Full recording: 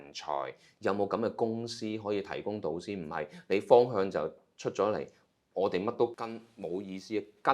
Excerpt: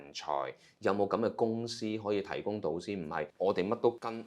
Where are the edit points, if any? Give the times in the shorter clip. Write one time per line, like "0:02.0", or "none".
0:03.3

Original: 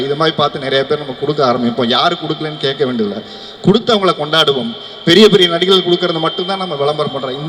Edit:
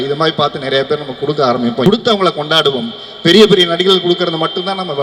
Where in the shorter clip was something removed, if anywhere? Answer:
0:01.8

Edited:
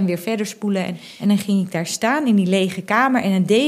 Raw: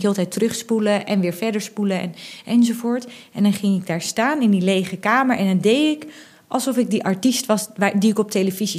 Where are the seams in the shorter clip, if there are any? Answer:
0:01.0

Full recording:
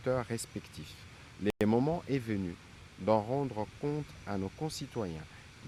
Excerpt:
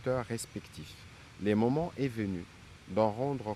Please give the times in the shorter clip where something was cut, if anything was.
0:01.5

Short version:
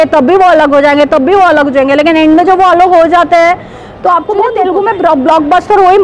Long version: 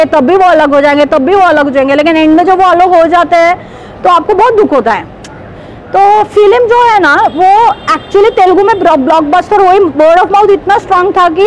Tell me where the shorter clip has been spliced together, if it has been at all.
0:04.6

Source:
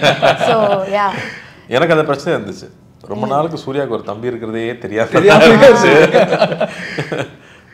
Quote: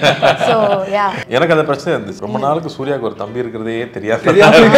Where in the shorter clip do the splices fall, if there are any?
0:01.2
0:02.2

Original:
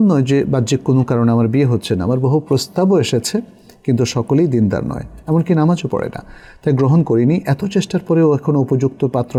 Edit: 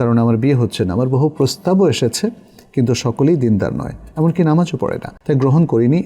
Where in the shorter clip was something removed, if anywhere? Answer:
0:05.1

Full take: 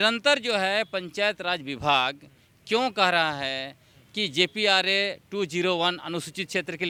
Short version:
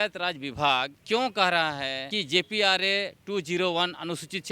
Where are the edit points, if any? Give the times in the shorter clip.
0:01.0
0:02.0

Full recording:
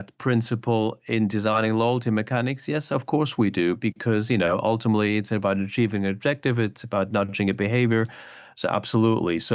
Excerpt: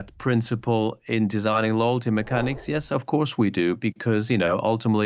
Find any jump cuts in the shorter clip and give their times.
none

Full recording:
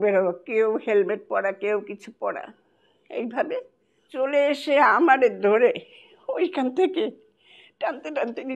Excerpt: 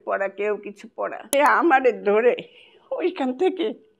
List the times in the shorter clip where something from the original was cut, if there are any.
0:01.2

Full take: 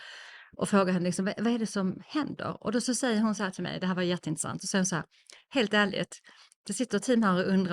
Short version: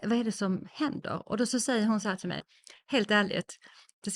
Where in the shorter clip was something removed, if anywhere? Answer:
0:02.4

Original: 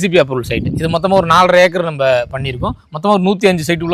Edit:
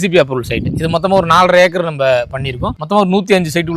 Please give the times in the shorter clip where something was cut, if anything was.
0:02.7

